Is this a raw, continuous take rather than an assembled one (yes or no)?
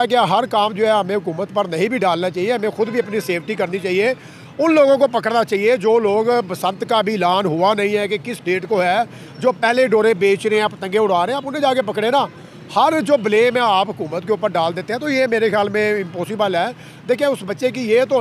yes